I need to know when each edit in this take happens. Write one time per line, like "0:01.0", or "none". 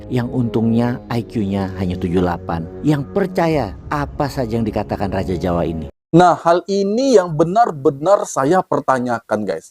0:05.9